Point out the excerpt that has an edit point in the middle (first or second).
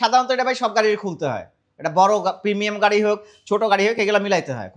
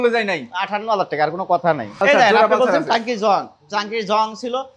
second